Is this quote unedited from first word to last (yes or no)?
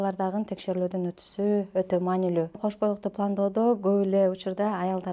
no